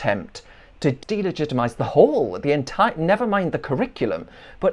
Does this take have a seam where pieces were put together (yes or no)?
yes